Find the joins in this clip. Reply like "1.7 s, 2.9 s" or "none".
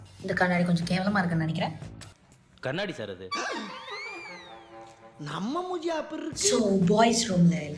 6.5 s